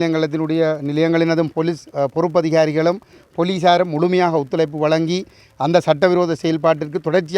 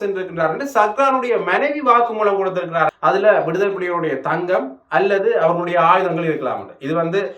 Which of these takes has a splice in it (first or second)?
second